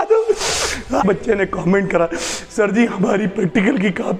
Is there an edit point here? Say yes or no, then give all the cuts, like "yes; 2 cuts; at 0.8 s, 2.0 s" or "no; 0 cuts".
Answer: yes; 1 cut; at 1.0 s